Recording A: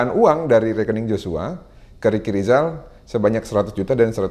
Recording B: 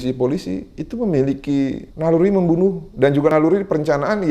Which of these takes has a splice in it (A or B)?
B